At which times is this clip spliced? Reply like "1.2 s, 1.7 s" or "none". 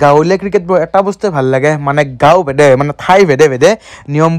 none